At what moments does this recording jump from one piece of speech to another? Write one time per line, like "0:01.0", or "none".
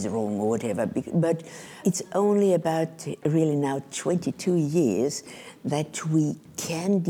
0:01.8